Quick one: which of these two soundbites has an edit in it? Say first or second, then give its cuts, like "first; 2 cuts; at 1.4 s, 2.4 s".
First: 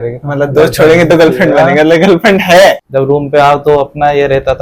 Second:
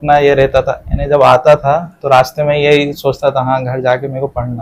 first; 1 cut; at 2.8 s